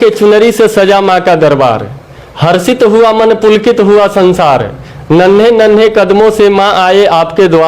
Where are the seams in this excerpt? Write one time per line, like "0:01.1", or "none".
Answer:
none